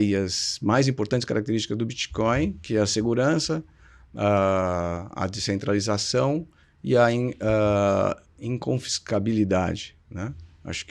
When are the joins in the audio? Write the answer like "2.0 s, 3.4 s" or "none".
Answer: none